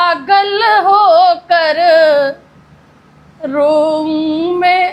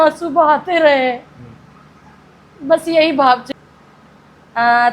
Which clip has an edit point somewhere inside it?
second; 1 cut; at 3.5 s

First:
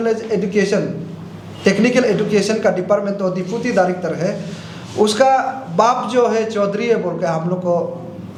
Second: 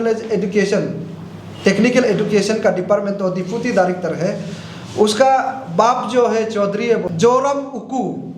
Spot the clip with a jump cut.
second; 1 cut; at 7.1 s

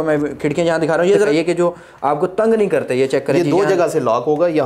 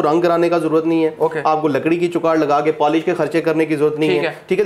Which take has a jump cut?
first; 1 cut; at 1.3 s

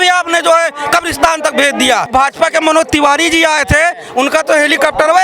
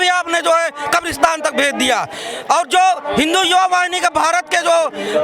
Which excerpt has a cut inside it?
first; 1 cut; at 2.1 s

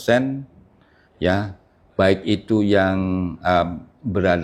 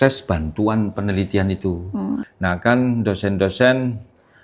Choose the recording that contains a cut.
second; 1 cut; at 2.3 s

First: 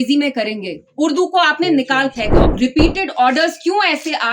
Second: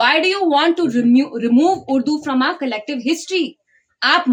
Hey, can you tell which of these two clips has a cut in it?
first; 1 cut; at 2.4 s

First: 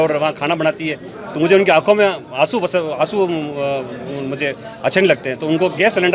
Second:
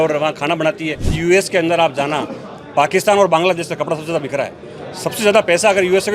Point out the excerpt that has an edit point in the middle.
second; 1 cut; at 1.2 s

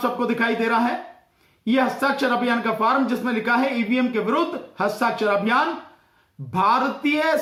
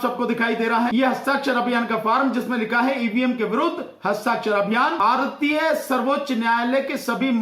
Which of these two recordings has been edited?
second; 2 cuts; at 0.9 s, 5.0 s

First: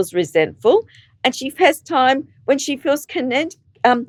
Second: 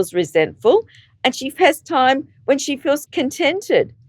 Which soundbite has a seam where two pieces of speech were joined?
second; 1 cut; at 3.1 s

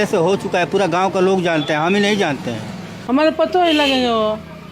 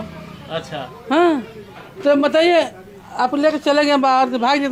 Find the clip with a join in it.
first; 1 cut; at 2.9 s

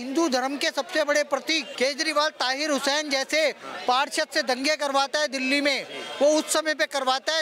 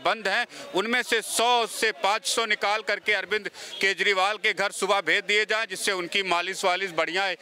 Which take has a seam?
first; 1 cut; at 1.7 s

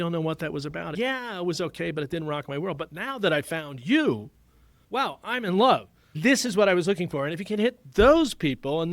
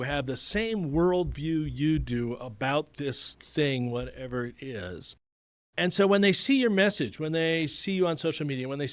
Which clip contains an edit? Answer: first; 1 cut; at 0.9 s

